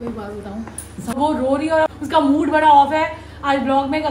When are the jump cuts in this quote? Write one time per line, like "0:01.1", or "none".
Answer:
0:01.1
0:01.9